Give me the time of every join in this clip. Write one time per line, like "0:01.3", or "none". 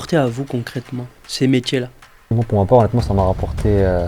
0:02.3